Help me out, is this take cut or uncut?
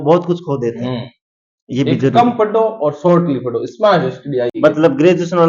cut